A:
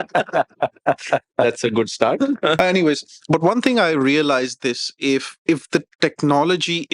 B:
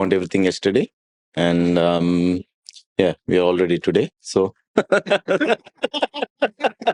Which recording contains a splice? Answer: A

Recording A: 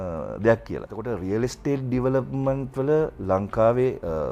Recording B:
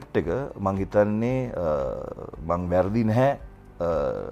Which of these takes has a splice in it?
A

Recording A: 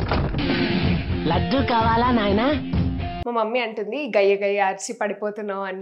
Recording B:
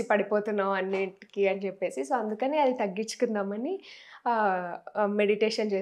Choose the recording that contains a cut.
A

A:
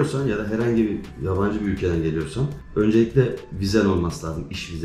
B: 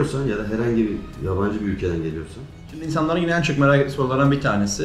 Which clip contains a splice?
B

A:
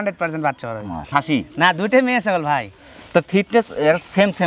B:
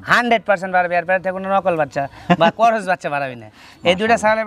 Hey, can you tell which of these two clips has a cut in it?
A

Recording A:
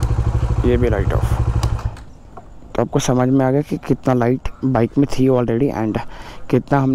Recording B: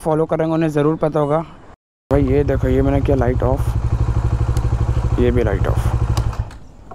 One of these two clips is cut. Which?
B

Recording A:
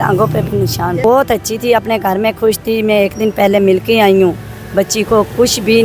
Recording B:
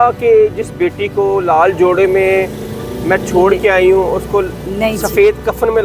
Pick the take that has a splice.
A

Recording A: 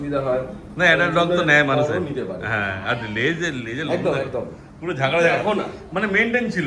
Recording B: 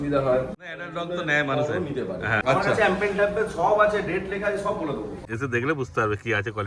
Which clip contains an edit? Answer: B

